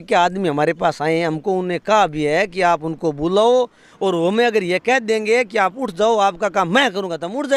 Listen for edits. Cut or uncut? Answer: uncut